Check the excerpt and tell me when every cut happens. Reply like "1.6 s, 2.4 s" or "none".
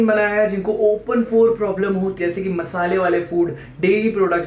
2.2 s